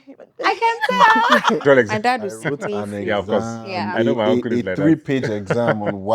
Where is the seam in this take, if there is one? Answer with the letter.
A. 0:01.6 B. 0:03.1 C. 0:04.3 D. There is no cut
A